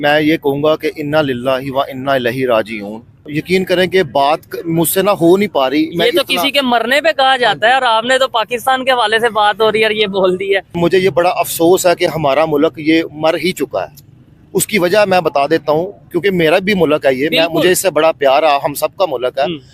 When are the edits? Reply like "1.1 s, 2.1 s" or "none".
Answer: 3.3 s, 10.7 s